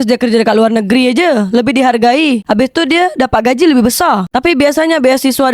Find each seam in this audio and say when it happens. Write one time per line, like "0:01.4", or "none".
0:04.2